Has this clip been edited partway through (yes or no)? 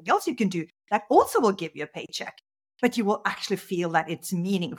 no